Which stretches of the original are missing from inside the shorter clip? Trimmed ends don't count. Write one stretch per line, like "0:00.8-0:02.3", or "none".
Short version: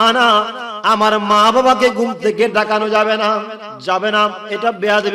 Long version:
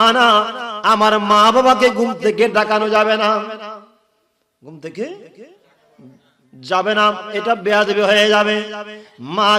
0:03.6-0:06.5